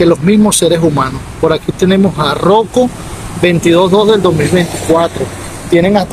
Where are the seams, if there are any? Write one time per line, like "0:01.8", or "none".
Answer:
none